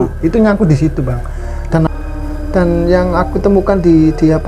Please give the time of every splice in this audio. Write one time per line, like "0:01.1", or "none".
0:01.9